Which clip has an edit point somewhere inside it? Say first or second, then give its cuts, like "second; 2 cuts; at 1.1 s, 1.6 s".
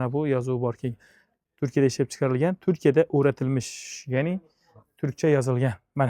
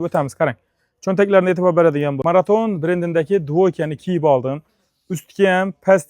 second; 1 cut; at 2.2 s